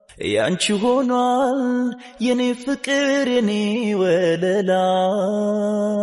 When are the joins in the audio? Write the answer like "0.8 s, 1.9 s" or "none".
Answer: none

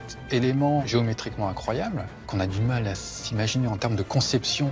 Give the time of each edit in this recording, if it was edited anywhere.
0.8 s, 2.2 s

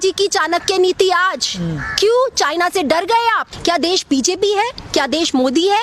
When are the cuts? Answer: 3.5 s

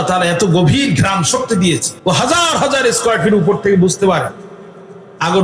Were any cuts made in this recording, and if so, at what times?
1.9 s

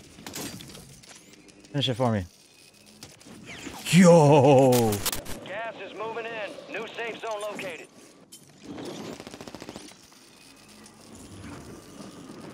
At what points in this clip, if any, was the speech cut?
5.0 s

